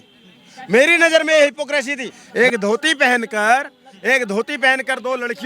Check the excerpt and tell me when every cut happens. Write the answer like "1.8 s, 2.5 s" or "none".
2.2 s